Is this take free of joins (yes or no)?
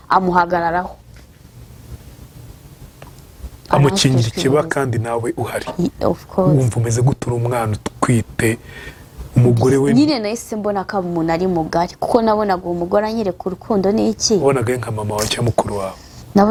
yes